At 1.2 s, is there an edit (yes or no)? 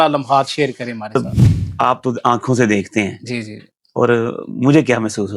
yes